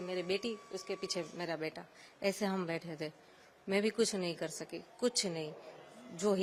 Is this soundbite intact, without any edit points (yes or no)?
yes